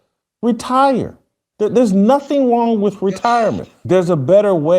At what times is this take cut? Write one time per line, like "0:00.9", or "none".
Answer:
0:03.7